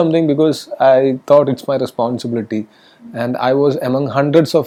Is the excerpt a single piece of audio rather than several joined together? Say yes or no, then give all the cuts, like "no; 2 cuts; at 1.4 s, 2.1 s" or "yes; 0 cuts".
yes; 0 cuts